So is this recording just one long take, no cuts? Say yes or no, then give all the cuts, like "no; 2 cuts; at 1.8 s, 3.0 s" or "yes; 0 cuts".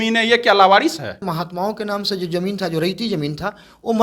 no; 1 cut; at 1.3 s